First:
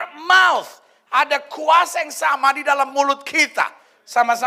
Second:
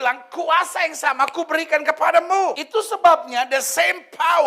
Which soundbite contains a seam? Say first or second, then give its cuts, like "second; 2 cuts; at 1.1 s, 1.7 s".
second; 1 cut; at 2.5 s